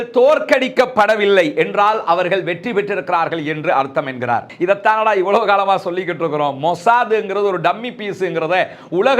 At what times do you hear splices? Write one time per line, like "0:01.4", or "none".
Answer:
0:04.5